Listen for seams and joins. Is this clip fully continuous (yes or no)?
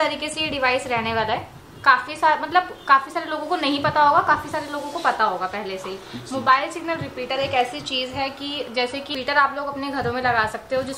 no